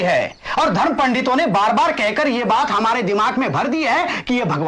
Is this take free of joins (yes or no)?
yes